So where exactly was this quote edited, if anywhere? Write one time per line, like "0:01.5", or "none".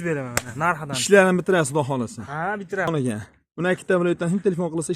0:02.9